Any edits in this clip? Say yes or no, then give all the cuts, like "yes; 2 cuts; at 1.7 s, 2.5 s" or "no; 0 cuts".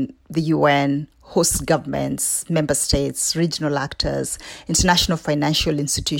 no; 0 cuts